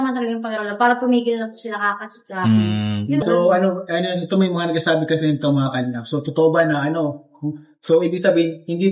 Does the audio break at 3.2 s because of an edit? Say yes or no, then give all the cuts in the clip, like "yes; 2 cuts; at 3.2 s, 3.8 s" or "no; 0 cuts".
yes; 1 cut; at 3.2 s